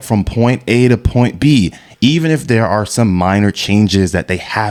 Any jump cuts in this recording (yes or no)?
no